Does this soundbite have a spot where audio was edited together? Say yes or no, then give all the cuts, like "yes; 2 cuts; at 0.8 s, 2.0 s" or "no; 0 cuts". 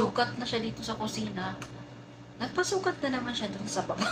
no; 0 cuts